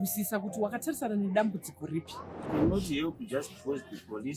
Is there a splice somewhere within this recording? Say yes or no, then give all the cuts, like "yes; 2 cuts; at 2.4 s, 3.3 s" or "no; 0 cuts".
yes; 1 cut; at 2.5 s